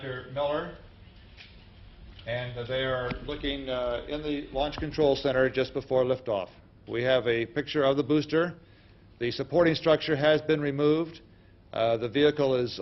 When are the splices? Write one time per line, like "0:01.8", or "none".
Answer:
0:08.3